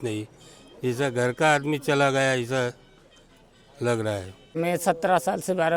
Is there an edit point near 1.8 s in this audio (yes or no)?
no